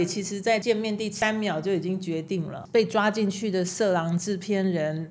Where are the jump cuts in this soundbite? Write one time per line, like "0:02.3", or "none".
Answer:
0:00.8
0:02.6